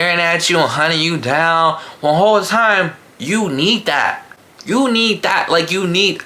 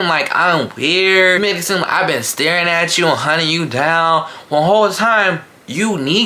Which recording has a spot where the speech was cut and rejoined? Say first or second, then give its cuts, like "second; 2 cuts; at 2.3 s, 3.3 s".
second; 1 cut; at 1.4 s